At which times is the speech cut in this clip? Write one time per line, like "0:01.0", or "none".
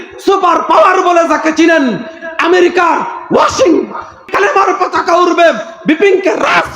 0:04.2